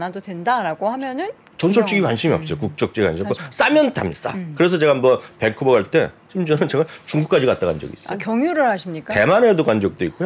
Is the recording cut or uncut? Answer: uncut